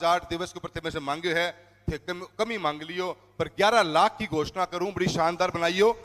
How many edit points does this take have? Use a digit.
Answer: 0